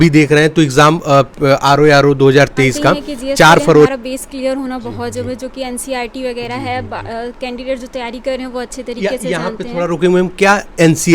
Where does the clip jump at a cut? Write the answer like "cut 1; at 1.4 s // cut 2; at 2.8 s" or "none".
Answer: cut 1; at 3.9 s